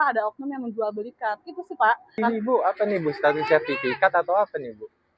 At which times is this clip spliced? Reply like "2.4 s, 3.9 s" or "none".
2.2 s